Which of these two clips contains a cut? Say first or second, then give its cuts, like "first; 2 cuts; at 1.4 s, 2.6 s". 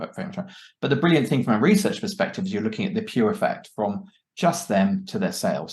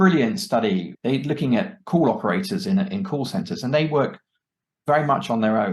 second; 1 cut; at 0.9 s